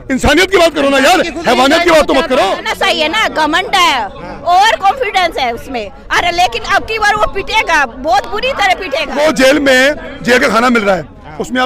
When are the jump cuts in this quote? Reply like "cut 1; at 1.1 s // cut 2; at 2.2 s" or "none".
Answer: cut 1; at 2.7 s // cut 2; at 9.1 s